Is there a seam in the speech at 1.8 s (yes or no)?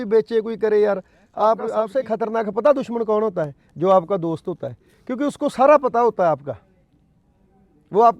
yes